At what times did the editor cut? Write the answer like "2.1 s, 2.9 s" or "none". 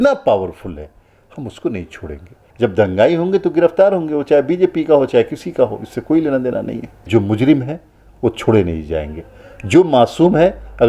2.4 s, 7.1 s

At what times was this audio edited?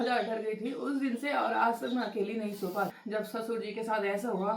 3.0 s

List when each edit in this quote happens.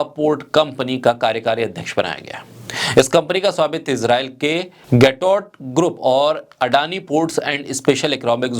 4.7 s

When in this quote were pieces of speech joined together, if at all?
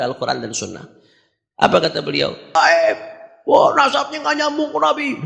2.6 s

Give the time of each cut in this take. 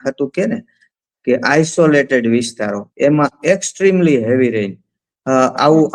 none

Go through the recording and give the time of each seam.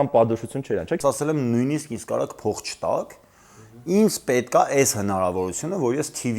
1.0 s

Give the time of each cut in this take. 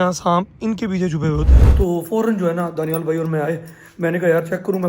1.6 s

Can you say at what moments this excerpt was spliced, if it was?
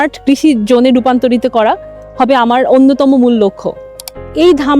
3.9 s

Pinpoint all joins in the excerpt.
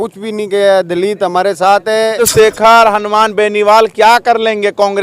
2.2 s

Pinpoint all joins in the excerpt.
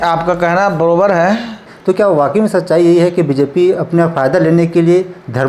1.7 s

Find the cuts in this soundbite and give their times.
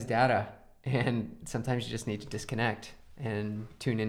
none

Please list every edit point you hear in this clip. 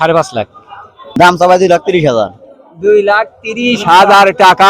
1.0 s

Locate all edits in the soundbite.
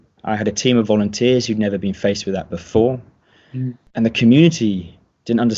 3.8 s

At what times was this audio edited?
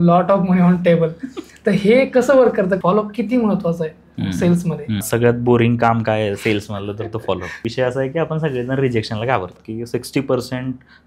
2.8 s, 5.1 s, 7.6 s, 9.6 s

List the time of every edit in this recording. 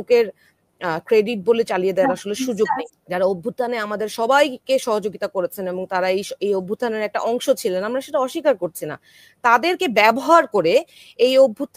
2.9 s

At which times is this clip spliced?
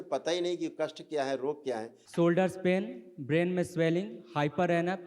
2.0 s

